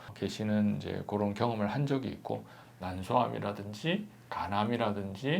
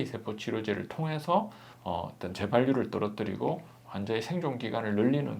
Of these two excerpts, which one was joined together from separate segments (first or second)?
first